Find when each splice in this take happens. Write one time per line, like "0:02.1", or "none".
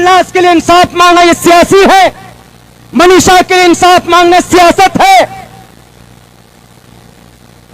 0:01.2